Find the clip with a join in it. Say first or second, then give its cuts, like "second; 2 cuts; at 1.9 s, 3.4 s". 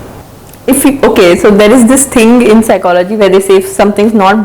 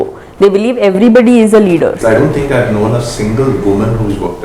second; 1 cut; at 2.0 s